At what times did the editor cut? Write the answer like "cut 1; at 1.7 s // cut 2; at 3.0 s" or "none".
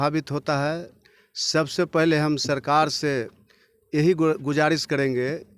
none